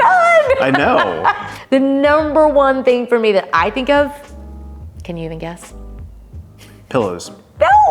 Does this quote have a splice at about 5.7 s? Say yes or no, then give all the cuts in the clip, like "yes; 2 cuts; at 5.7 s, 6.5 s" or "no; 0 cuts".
no; 1 cut; at 1.5 s